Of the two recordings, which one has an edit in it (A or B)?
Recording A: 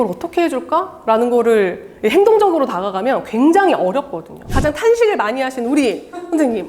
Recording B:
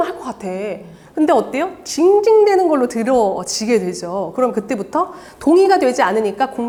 A